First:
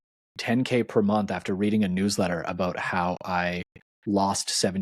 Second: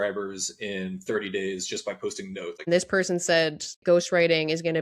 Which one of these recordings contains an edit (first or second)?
second